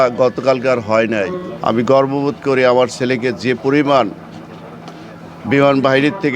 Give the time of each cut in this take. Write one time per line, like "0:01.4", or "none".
0:01.5